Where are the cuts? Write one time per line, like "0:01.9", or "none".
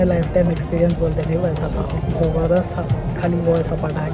none